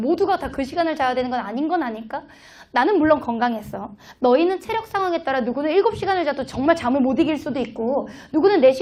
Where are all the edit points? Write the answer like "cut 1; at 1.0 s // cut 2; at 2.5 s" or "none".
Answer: cut 1; at 3.5 s